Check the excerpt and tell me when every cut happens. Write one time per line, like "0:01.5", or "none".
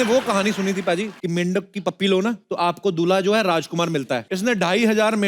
0:01.1
0:02.4
0:04.3